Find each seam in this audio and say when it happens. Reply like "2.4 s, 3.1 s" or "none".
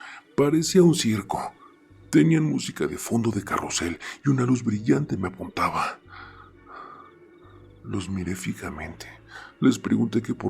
7.8 s